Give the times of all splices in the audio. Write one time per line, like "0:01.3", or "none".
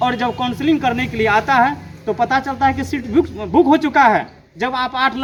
none